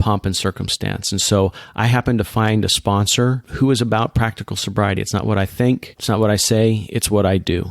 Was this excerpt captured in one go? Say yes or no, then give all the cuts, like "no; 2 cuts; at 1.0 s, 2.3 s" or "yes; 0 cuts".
no; 2 cuts; at 3.5 s, 5.9 s